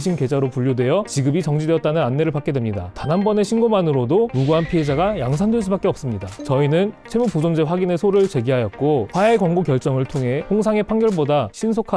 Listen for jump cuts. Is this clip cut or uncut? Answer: cut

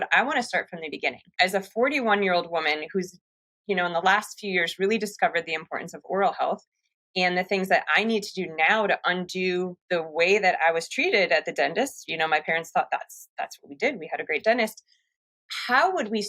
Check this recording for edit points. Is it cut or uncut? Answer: cut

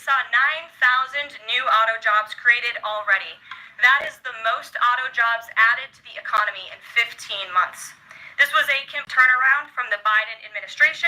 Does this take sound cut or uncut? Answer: cut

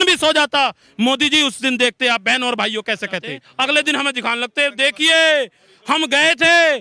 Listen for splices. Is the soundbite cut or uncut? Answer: cut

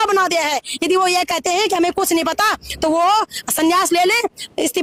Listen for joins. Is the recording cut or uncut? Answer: uncut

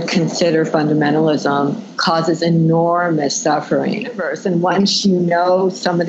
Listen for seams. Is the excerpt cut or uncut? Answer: cut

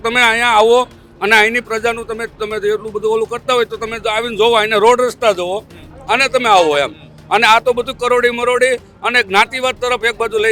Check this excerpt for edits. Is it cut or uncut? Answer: uncut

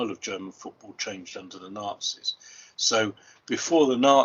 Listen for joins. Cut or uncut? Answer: uncut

